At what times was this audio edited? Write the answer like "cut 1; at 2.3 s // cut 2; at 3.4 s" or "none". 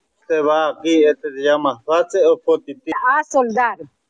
cut 1; at 2.9 s